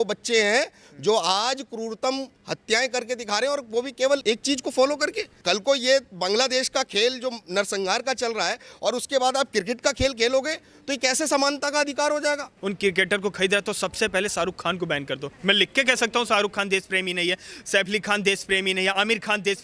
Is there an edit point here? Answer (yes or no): yes